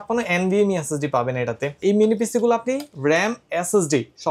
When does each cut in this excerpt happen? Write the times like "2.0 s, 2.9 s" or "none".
1.8 s